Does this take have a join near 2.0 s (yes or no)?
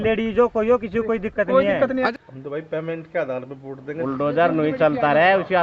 yes